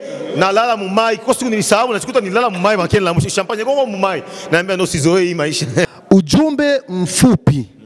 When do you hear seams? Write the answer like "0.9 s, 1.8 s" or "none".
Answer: 6.0 s